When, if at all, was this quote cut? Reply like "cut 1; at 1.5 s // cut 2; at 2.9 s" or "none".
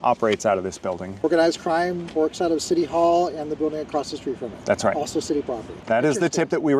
cut 1; at 1.2 s // cut 2; at 5.7 s